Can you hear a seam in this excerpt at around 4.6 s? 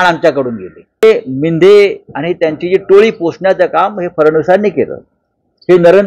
no; 1 cut; at 1.0 s

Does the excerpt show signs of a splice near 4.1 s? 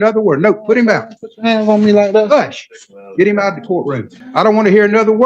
yes; 1 cut; at 4.1 s

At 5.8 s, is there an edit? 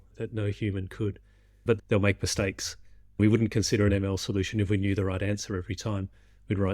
no; 2 cuts; at 1.8 s, 3.2 s

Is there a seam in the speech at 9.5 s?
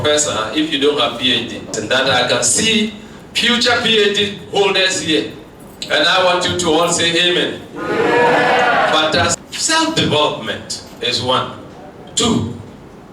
yes; 2 cuts; at 1.8 s, 9.5 s

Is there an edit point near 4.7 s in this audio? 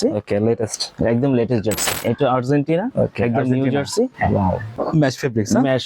yes; 2 cuts; at 1.9 s, 4.7 s

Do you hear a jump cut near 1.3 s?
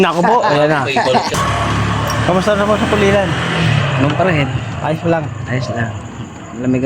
yes; 1 cut; at 1.3 s

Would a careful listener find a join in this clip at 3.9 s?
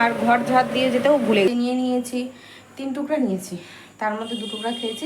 no; 1 cut; at 1.5 s

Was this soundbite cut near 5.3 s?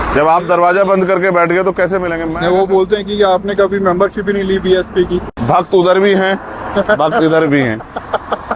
yes; 2 cuts; at 2.2 s, 5.3 s

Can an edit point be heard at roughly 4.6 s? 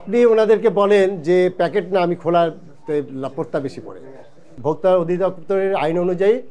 yes; 1 cut; at 4.6 s

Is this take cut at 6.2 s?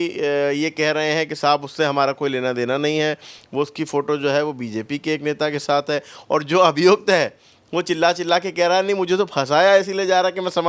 no; 0 cuts

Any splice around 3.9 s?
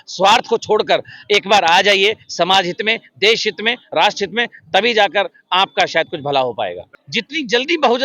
no; 1 cut; at 6.9 s

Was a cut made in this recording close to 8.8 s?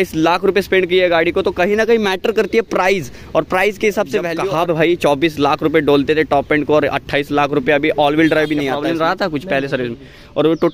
yes; 2 cuts; at 4.3 s, 8.8 s

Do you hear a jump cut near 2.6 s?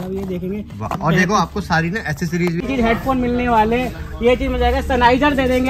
yes; 1 cut; at 2.6 s

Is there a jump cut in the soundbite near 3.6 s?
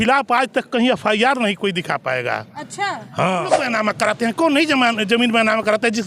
yes; 1 cut; at 3.6 s

